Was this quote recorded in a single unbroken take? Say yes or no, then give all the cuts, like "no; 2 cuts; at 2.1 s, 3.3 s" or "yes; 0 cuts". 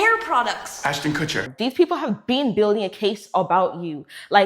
no; 1 cut; at 1.5 s